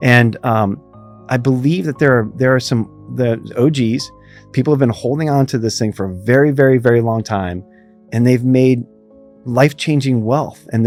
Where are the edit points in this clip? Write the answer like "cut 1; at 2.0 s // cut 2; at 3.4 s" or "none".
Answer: none